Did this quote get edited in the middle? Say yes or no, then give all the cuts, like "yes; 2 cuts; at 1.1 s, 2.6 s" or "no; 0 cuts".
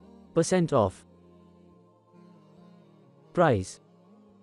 yes; 2 cuts; at 0.9 s, 3.3 s